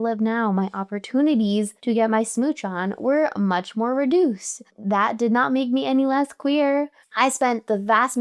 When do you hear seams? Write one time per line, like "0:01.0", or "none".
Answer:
0:01.8
0:07.0